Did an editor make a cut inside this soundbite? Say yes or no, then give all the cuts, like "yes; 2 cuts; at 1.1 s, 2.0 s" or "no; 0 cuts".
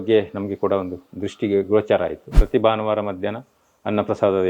yes; 1 cut; at 2.4 s